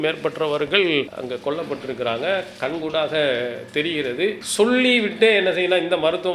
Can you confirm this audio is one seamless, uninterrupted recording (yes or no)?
no